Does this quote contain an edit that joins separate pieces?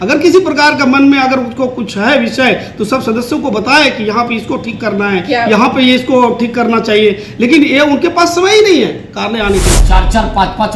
yes; 1 cut; at 9.8 s

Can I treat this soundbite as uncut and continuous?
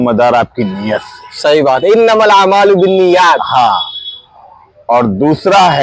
yes; 0 cuts

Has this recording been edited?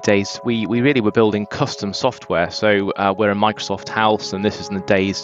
no; 0 cuts

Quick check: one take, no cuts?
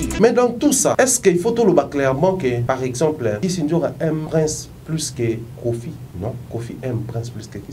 no; 5 cuts; at 0.9 s, 2.6 s, 3.4 s, 4.3 s, 6.1 s

